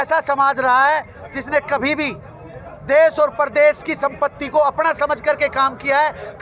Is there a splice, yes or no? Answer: no